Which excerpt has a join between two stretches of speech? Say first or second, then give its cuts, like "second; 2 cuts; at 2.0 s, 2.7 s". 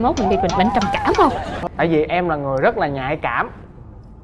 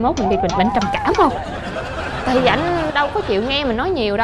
first; 1 cut; at 1.5 s